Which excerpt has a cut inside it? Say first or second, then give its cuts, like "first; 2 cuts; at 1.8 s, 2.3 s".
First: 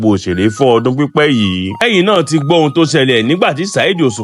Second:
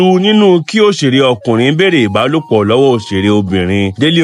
first; 1 cut; at 1.7 s